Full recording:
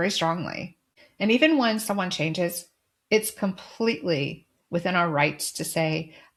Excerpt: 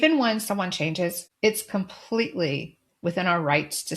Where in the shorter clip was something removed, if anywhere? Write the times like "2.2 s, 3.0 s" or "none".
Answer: 1.2 s